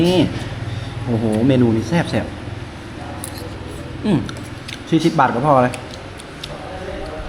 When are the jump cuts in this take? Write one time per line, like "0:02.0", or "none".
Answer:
none